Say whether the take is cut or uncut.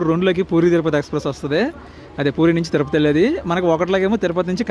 uncut